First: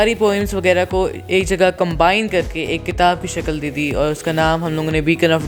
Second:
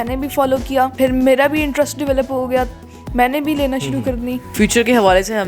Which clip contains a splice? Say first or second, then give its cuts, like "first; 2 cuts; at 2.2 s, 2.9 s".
second; 2 cuts; at 0.9 s, 4.5 s